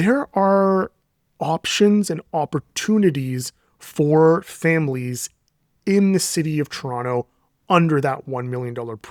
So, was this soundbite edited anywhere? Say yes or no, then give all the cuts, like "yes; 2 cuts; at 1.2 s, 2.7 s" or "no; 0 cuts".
no; 0 cuts